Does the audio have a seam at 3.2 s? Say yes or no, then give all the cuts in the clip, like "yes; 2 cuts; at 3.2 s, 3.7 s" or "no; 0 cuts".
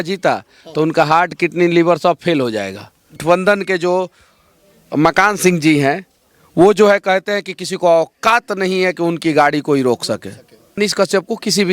yes; 2 cuts; at 3.2 s, 10.8 s